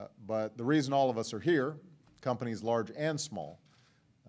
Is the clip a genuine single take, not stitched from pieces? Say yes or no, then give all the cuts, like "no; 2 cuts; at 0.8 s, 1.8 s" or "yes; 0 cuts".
no; 1 cut; at 3.0 s